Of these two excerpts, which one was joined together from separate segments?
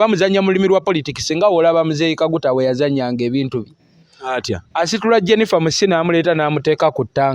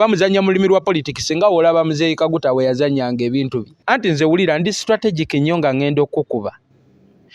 second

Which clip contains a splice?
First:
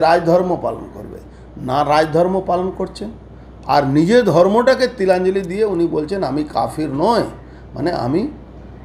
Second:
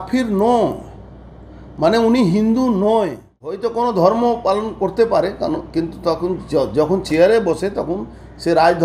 second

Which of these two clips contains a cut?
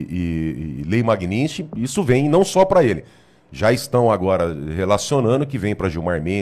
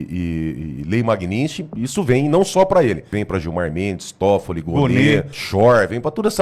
second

